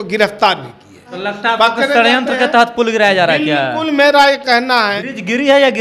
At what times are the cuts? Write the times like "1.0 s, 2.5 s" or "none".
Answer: 1.1 s, 4.9 s